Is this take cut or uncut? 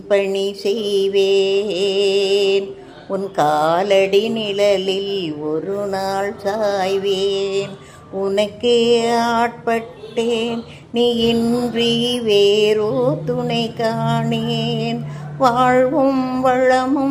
uncut